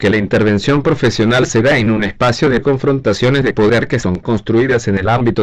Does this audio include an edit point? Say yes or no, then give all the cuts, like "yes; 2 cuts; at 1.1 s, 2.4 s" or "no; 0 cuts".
yes; 1 cut; at 2.5 s